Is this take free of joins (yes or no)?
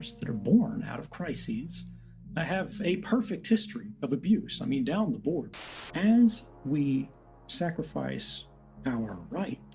no